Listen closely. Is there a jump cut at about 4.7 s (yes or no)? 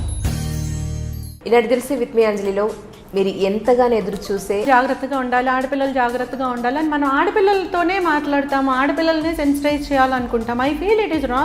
yes